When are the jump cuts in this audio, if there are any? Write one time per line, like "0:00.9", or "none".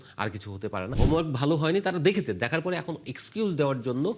0:00.9